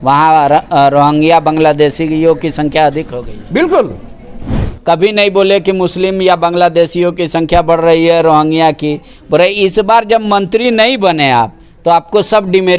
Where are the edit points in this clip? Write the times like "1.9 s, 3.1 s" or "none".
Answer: 4.7 s